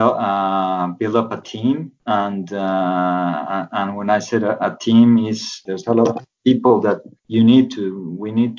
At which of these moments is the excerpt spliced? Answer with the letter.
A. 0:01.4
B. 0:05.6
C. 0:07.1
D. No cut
B